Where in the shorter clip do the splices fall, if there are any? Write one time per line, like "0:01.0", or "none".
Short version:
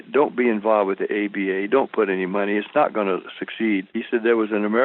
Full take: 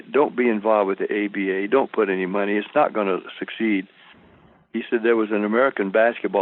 0:03.9